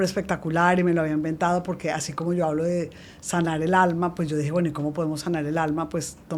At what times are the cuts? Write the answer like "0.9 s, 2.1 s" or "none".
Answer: none